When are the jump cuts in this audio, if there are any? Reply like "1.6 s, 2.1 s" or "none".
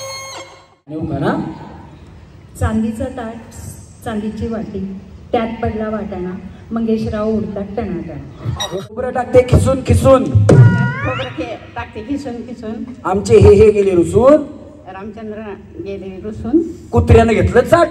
0.9 s, 9.0 s